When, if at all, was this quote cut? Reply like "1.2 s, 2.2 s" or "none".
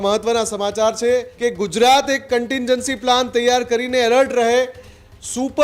1.3 s